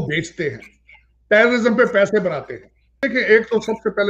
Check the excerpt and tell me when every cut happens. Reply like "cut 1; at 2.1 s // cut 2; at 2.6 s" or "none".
cut 1; at 3.0 s

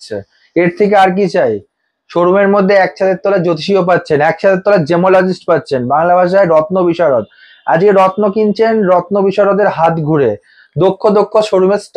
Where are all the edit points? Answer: none

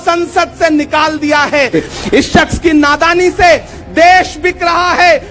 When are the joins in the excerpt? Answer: cut 1; at 1.7 s

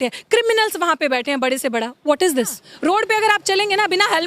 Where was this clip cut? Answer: cut 1; at 2.6 s

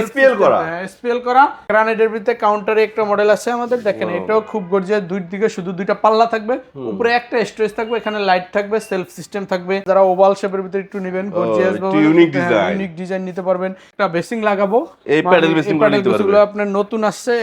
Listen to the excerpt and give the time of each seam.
cut 1; at 1.6 s // cut 2; at 9.8 s // cut 3; at 13.8 s

